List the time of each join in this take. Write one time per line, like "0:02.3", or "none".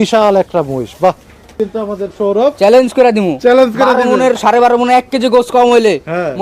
0:01.6